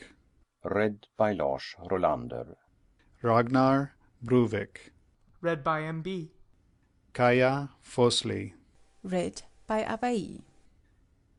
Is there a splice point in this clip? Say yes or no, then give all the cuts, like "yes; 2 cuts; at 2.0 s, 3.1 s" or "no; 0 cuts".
no; 0 cuts